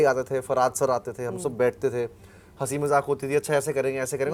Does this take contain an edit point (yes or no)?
no